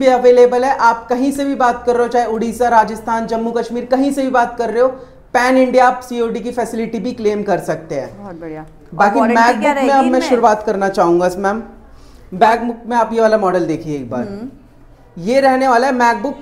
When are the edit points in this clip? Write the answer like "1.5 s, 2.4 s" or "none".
none